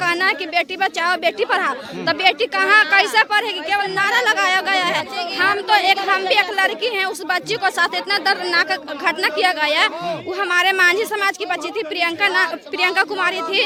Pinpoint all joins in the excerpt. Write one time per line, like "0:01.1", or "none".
none

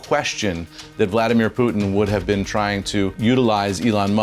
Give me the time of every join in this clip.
0:03.1

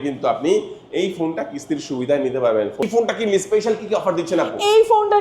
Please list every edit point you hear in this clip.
0:02.8

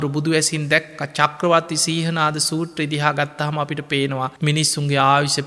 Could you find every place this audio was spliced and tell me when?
0:04.3

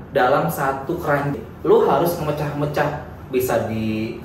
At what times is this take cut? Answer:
0:01.3

